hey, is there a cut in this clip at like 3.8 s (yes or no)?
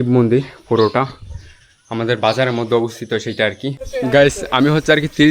yes